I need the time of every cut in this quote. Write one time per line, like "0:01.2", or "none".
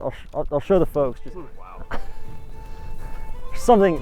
0:01.2